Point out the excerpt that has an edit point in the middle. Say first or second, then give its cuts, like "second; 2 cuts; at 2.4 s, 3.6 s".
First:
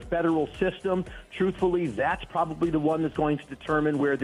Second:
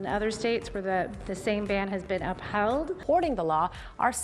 second; 1 cut; at 2.9 s